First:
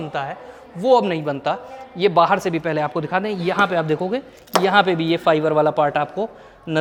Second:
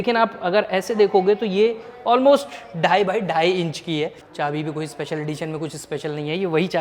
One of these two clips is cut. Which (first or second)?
second